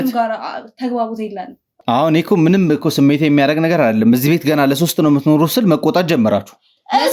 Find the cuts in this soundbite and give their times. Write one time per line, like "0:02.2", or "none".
0:01.7